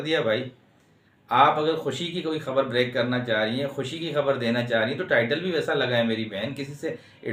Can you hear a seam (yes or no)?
no